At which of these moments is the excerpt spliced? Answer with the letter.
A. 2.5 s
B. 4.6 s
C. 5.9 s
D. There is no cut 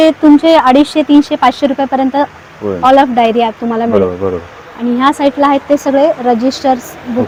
D